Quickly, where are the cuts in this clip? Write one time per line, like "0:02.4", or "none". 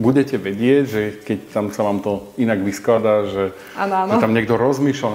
none